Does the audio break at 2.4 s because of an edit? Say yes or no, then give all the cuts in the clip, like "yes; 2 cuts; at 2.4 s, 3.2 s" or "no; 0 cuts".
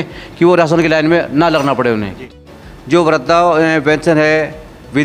yes; 1 cut; at 2.4 s